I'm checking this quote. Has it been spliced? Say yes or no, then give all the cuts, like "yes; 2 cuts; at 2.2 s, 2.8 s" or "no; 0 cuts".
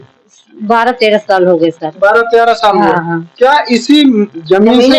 no; 0 cuts